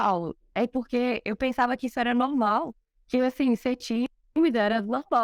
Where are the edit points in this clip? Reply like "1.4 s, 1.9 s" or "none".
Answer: none